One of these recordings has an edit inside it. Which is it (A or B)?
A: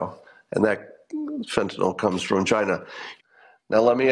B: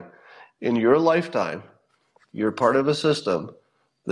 A